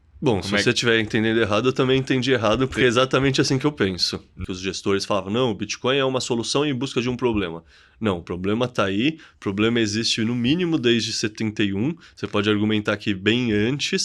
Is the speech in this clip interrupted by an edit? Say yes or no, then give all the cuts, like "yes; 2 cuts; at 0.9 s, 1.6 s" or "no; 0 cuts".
yes; 1 cut; at 4.3 s